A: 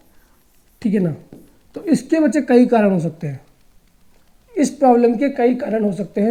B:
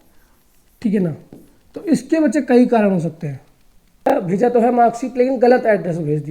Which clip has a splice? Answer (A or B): B